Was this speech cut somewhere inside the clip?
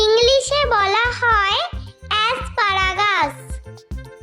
yes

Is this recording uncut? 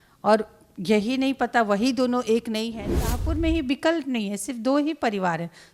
no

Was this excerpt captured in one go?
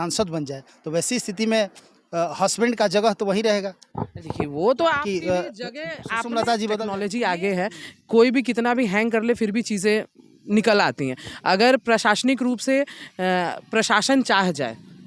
no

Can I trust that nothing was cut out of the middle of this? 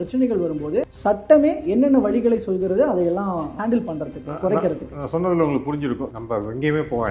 no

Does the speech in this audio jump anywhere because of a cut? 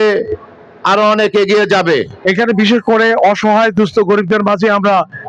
yes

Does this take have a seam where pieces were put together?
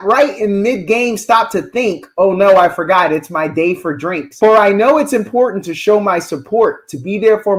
no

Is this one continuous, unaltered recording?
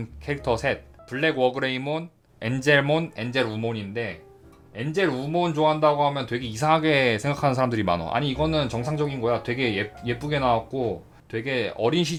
yes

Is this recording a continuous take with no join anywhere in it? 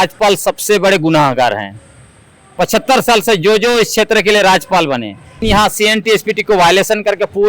no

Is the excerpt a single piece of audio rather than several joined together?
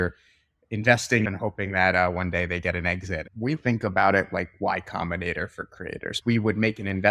no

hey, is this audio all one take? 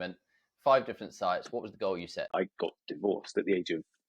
no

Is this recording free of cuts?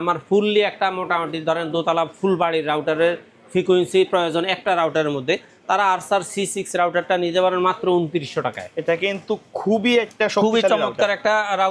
yes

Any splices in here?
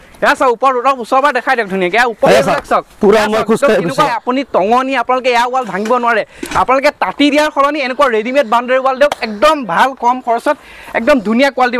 yes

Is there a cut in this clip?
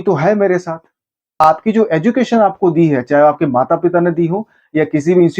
yes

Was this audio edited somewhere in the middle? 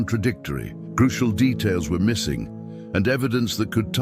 no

